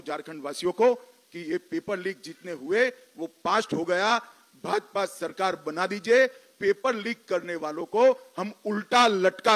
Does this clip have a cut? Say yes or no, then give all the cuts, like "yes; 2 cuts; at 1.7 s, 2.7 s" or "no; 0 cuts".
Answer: no; 0 cuts